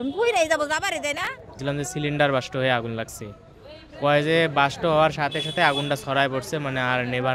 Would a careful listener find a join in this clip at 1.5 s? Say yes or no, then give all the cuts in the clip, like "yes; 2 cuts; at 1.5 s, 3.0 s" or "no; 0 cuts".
yes; 1 cut; at 1.5 s